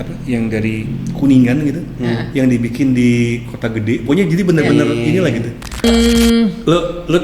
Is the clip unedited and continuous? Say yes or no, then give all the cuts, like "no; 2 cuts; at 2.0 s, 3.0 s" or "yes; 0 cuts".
no; 1 cut; at 5.8 s